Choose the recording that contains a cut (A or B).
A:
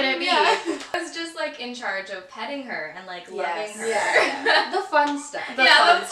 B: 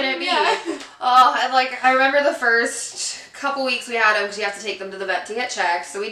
A